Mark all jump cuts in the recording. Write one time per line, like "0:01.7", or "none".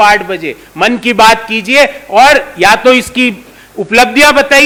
none